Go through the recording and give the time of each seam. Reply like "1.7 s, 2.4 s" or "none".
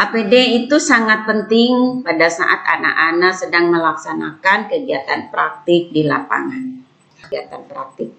7.2 s